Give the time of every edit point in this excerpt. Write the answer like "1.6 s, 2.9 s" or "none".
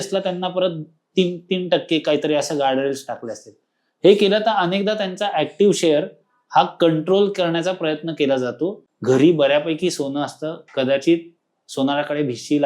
8.9 s